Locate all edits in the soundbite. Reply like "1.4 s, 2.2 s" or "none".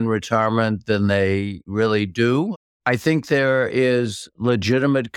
1.6 s, 2.6 s